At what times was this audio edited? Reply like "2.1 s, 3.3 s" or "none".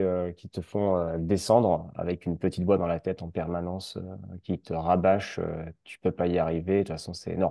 none